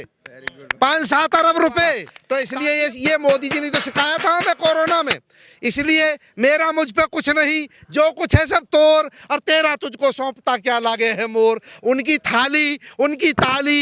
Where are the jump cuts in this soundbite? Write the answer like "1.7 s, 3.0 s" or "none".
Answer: 2.1 s